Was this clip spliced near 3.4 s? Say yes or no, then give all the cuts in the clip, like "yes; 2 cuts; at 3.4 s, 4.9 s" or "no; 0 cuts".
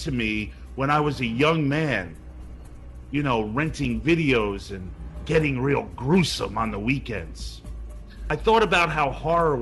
yes; 1 cut; at 3.4 s